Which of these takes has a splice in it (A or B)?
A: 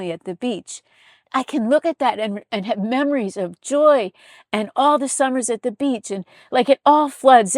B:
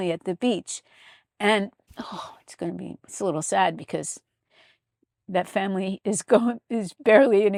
A